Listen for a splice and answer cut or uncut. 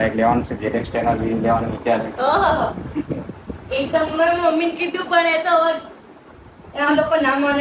uncut